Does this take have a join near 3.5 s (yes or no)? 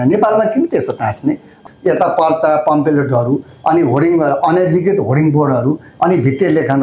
no